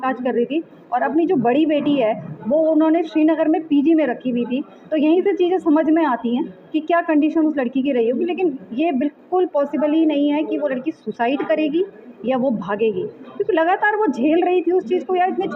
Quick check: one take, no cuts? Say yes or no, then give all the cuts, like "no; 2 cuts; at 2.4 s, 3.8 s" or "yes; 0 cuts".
yes; 0 cuts